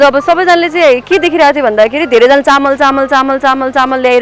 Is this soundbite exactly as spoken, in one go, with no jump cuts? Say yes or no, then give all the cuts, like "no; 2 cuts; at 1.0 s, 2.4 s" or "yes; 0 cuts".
yes; 0 cuts